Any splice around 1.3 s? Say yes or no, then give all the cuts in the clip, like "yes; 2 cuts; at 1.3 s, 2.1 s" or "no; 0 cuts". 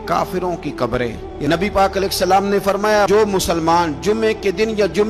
yes; 1 cut; at 1.3 s